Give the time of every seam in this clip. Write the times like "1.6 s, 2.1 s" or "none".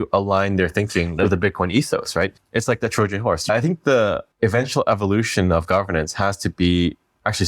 1.2 s, 2.3 s, 3.5 s, 4.3 s